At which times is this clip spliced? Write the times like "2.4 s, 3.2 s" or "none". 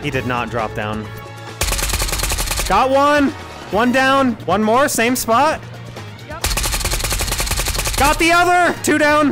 1.2 s, 4.4 s